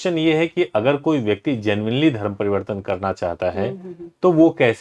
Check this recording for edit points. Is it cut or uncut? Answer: uncut